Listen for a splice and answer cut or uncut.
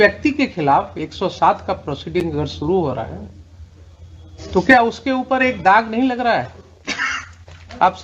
uncut